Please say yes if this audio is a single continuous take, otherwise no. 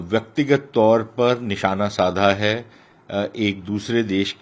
yes